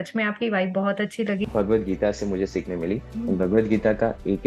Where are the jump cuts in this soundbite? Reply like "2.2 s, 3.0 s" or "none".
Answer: 1.4 s